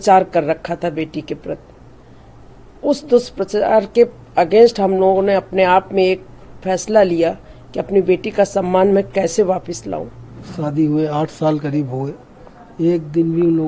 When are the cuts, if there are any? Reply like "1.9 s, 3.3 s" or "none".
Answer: 10.4 s